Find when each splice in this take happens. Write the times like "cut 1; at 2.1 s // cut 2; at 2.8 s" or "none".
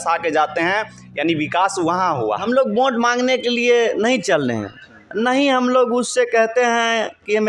cut 1; at 2.4 s